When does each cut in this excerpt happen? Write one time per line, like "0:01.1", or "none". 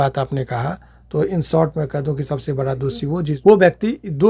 0:03.4